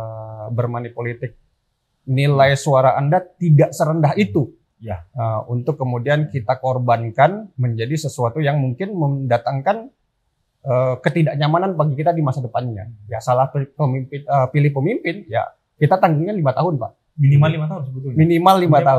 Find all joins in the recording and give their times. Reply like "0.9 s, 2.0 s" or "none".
none